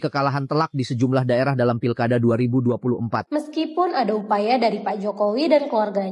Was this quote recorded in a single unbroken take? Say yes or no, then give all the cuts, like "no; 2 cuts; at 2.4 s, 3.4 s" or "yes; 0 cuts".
no; 1 cut; at 3.3 s